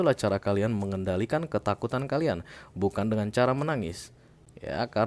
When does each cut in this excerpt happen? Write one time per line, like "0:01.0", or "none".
none